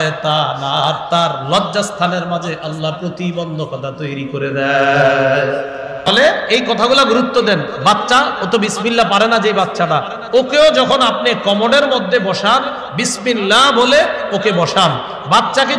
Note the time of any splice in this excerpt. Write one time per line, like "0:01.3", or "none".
0:06.1